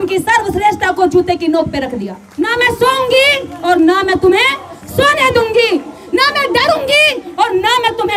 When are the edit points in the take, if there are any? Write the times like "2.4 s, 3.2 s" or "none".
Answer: 2.2 s